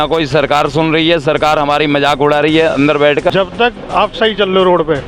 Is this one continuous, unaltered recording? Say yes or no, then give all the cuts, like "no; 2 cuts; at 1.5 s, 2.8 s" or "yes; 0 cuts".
no; 1 cut; at 3.3 s